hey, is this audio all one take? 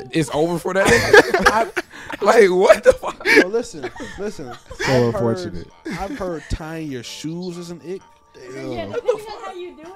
yes; 0 cuts

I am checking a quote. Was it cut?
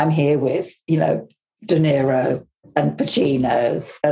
yes; 1 cut; at 2.5 s

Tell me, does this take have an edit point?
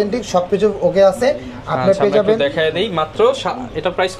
no; 0 cuts

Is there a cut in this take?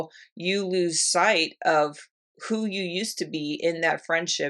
no; 0 cuts

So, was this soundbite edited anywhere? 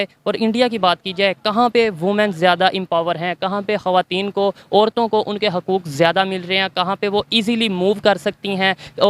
no; 0 cuts

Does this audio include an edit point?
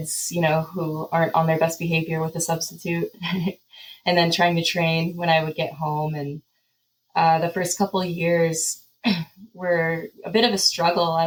no; 0 cuts

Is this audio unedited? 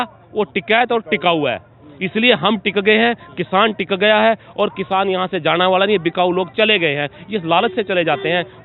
yes; 0 cuts

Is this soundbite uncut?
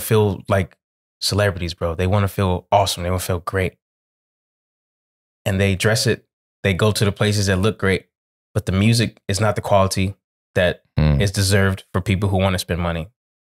yes; 0 cuts

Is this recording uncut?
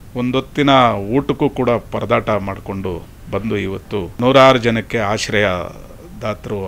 no; 1 cut; at 4.1 s

